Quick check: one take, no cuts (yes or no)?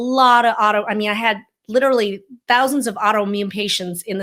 yes